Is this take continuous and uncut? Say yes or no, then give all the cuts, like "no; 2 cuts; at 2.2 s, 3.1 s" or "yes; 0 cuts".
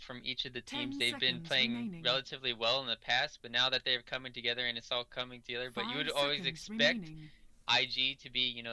no; 1 cut; at 4.2 s